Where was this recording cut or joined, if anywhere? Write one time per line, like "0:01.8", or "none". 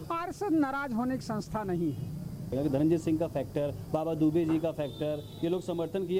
0:02.5